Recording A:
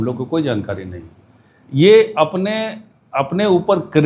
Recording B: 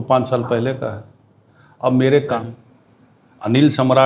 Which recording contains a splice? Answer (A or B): B